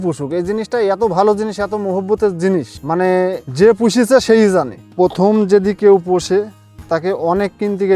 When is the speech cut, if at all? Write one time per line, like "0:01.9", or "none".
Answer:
0:03.0
0:04.8